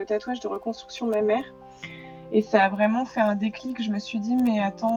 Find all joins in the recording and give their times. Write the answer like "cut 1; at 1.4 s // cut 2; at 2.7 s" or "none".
none